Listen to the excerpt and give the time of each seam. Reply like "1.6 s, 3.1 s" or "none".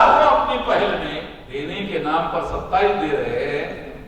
1.4 s